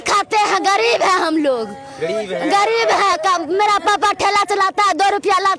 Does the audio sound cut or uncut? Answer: uncut